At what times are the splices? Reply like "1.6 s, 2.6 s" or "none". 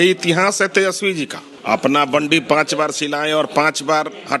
1.4 s

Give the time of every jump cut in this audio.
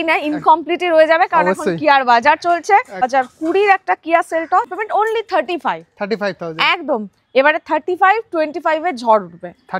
3.1 s, 4.7 s

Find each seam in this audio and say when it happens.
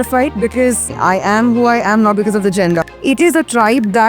0.9 s, 2.8 s

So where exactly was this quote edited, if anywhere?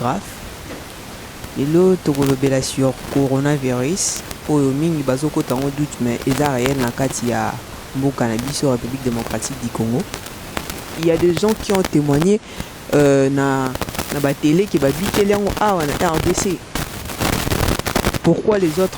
11.0 s

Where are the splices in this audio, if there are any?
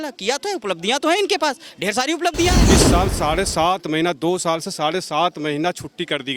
2.7 s

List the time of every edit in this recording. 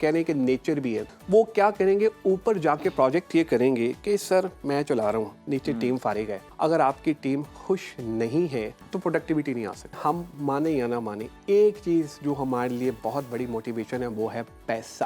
1.1 s, 6.4 s, 8.8 s, 10.0 s

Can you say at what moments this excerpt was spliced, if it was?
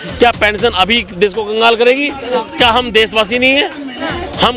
2.4 s

